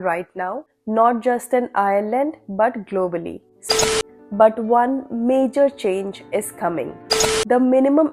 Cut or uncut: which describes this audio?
cut